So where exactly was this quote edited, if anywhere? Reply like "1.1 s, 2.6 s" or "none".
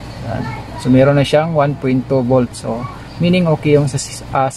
none